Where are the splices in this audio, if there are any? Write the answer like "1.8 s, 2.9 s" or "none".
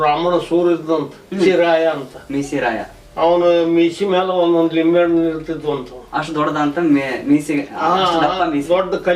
1.5 s